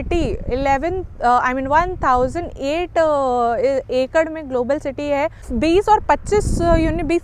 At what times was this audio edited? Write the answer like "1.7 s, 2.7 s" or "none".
5.5 s